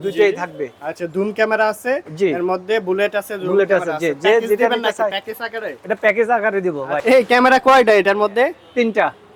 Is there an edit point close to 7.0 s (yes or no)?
yes